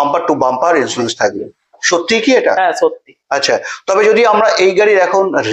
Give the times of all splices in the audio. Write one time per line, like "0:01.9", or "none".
none